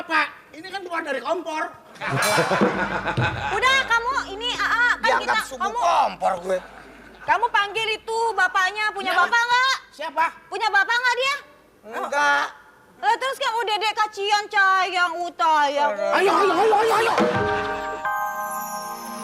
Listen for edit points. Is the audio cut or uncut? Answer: cut